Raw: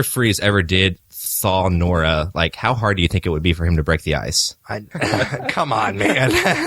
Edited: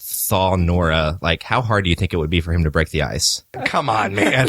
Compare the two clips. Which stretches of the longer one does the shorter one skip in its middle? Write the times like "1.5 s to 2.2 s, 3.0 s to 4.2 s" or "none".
4.6 s to 5.3 s